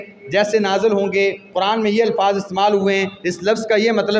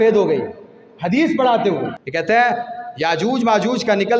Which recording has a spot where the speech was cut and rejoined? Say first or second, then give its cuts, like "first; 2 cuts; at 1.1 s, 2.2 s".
second; 1 cut; at 2.0 s